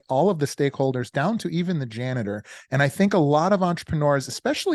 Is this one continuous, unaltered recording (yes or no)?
yes